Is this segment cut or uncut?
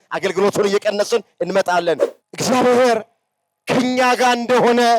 cut